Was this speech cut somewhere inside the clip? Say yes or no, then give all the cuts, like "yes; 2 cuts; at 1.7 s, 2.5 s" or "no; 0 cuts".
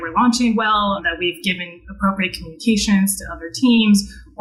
no; 0 cuts